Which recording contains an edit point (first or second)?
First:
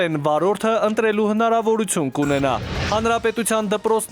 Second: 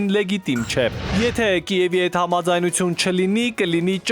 first